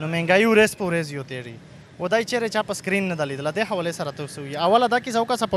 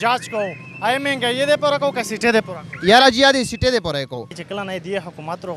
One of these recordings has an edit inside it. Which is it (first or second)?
second